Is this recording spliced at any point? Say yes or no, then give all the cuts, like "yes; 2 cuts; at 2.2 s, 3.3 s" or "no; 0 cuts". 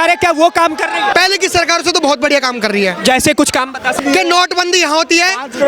yes; 2 cuts; at 1.1 s, 4.0 s